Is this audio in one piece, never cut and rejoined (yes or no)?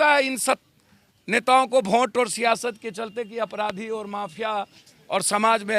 yes